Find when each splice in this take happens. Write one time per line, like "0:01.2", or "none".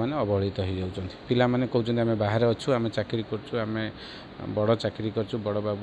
none